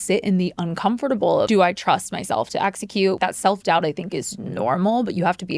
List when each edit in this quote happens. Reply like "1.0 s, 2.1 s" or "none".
1.5 s, 3.2 s